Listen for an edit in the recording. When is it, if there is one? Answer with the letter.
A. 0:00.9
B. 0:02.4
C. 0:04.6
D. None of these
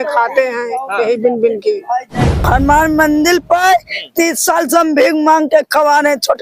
B